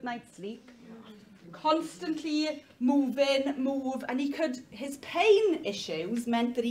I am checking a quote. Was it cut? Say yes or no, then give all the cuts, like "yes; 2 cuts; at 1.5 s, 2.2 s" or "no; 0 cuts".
no; 0 cuts